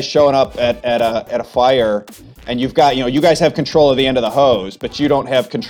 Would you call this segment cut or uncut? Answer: cut